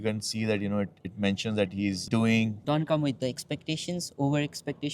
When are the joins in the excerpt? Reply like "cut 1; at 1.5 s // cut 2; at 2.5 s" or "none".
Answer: cut 1; at 2.6 s